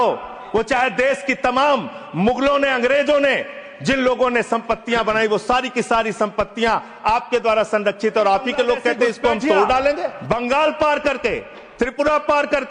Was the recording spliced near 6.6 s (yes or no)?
no